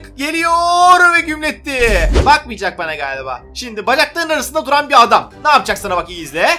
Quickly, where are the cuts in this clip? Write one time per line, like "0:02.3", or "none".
0:02.1

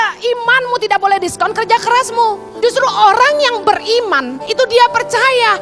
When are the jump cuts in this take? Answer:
0:02.5
0:04.4

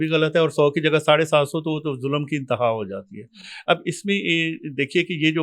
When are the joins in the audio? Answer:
none

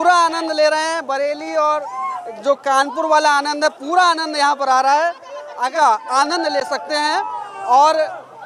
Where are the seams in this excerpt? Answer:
0:05.7

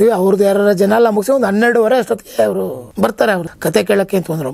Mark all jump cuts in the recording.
0:03.2

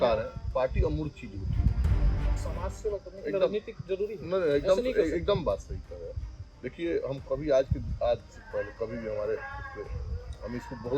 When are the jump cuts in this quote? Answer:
0:02.2

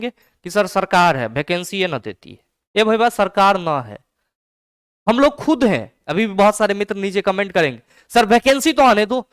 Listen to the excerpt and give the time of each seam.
0:06.0

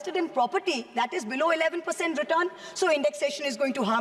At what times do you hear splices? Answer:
none

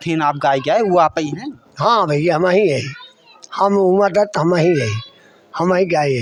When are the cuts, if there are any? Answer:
none

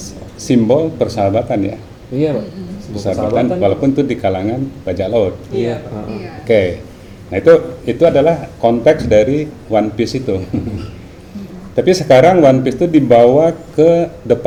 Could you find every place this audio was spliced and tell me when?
none

